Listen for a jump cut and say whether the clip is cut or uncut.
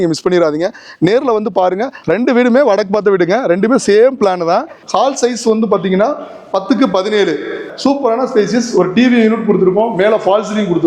cut